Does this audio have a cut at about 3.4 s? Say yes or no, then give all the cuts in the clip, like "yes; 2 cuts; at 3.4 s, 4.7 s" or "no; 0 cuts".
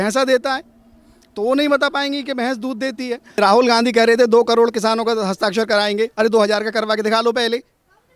yes; 1 cut; at 3.4 s